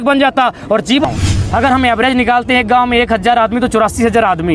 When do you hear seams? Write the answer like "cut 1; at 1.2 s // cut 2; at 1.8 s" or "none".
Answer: cut 1; at 1.0 s